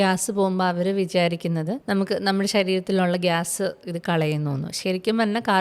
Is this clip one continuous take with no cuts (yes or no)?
no